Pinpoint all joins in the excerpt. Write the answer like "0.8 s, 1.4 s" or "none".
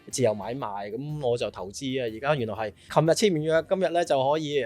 2.9 s